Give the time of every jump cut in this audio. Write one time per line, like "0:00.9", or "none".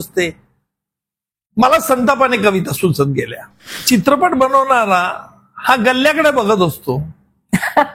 0:03.7